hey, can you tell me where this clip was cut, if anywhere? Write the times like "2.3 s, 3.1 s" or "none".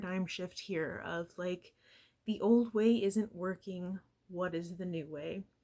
none